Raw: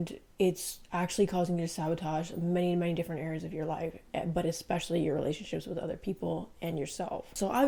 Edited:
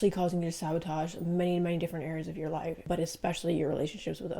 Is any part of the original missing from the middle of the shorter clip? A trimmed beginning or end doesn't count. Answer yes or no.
yes